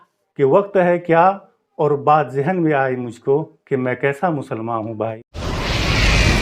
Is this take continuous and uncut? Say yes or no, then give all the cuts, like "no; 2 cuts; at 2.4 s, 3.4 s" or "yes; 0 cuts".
no; 1 cut; at 5.3 s